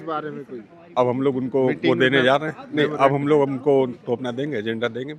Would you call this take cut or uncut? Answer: uncut